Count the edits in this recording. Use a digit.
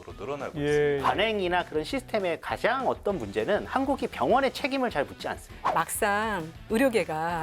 2